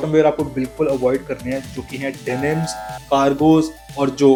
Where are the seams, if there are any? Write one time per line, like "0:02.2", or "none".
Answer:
none